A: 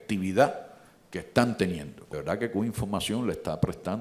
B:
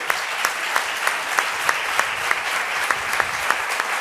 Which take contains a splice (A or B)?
A